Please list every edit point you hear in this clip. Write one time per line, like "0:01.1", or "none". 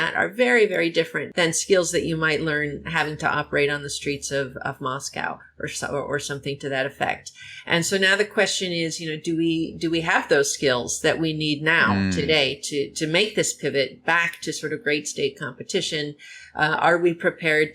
0:01.2